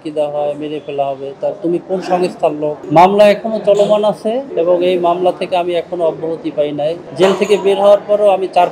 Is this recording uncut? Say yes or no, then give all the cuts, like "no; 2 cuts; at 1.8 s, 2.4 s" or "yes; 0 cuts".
no; 3 cuts; at 2.8 s, 4.5 s, 7.0 s